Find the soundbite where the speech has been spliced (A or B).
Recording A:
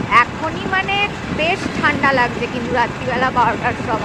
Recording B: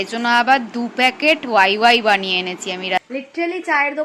B